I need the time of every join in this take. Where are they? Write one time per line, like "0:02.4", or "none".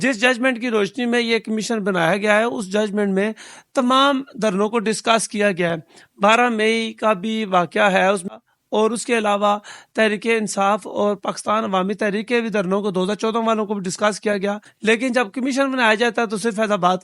0:08.3
0:14.7